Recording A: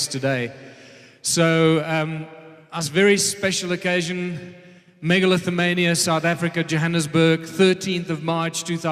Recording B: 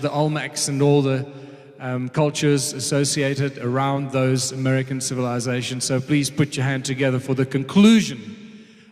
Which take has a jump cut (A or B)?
B